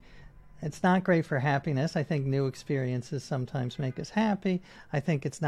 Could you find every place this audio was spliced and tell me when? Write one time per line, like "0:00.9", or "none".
none